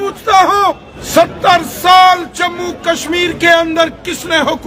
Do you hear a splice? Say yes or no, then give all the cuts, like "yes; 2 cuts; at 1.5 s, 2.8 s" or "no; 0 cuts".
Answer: yes; 1 cut; at 0.9 s